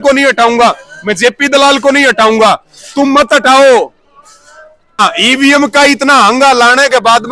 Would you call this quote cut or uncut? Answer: cut